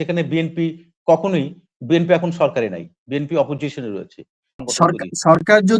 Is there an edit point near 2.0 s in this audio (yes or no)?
no